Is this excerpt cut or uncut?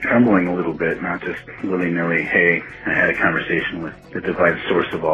cut